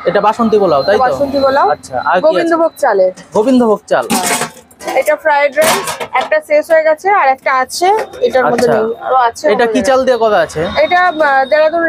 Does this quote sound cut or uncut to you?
uncut